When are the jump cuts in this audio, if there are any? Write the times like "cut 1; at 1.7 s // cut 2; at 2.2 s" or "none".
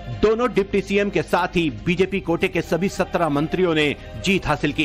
none